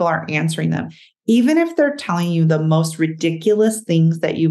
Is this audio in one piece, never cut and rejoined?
yes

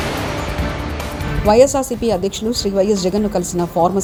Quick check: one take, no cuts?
yes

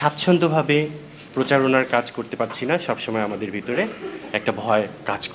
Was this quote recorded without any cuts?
yes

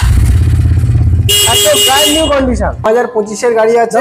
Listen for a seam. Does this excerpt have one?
yes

